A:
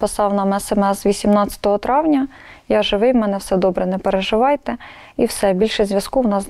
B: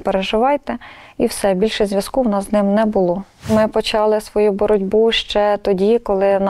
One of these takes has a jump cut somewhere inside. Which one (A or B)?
B